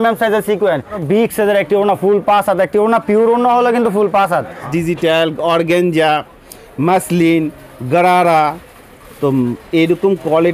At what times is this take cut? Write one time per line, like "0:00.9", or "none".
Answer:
0:01.0
0:04.6